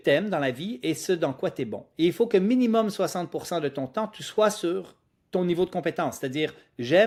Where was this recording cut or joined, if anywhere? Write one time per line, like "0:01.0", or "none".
none